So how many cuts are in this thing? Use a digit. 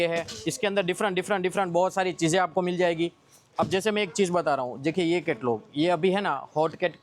0